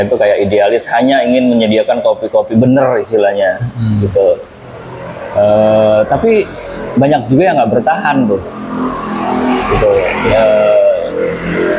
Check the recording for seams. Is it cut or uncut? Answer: uncut